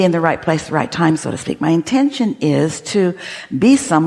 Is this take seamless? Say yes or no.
yes